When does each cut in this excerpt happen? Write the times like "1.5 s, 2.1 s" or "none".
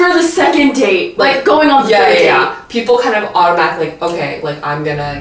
none